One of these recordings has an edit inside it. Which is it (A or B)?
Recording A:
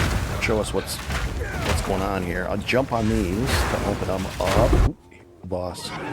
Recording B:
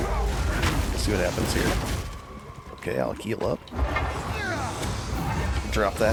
A